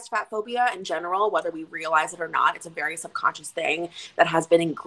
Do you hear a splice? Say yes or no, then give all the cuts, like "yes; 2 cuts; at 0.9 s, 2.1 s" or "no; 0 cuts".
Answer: no; 0 cuts